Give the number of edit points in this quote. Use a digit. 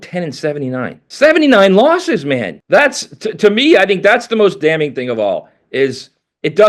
2